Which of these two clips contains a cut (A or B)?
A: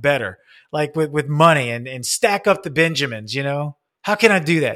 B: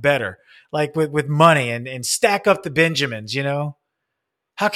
A